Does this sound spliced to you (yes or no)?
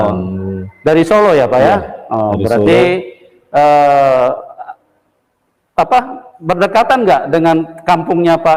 no